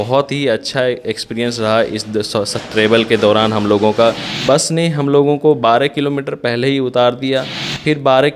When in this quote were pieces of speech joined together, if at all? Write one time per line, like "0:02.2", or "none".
0:04.3